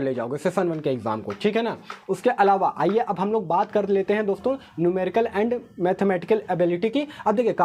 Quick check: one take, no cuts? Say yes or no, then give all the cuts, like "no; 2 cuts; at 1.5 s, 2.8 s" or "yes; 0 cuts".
yes; 0 cuts